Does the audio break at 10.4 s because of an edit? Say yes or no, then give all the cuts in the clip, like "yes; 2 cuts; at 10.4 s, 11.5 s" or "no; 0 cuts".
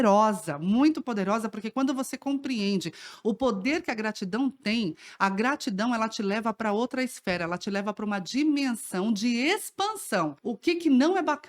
yes; 1 cut; at 10.4 s